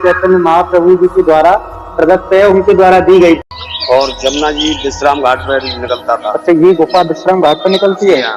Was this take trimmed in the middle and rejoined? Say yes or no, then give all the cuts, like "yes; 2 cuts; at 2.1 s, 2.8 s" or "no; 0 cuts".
yes; 1 cut; at 3.4 s